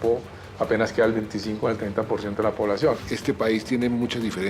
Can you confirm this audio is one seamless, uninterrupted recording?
no; 1 cut; at 3.1 s

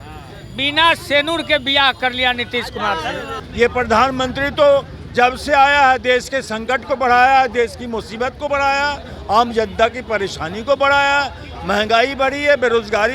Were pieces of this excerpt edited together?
yes; 1 cut; at 3.4 s

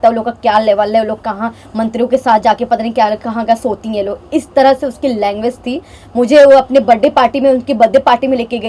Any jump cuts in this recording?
no; 0 cuts

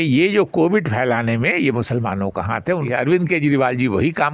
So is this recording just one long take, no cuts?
no; 1 cut; at 2.8 s

